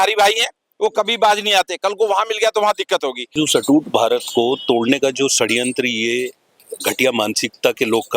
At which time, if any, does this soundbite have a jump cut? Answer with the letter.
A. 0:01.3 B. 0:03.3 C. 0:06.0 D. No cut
B